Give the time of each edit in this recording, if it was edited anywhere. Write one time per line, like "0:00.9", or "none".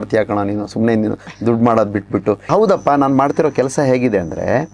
0:02.5